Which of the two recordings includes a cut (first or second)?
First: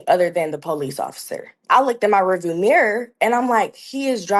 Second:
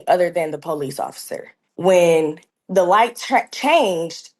first